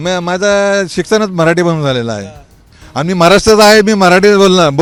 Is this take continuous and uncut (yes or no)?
yes